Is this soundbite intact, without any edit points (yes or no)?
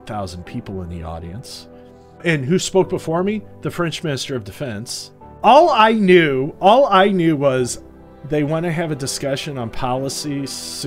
no